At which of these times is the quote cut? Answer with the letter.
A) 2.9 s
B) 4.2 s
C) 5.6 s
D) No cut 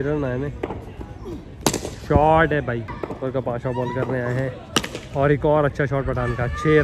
A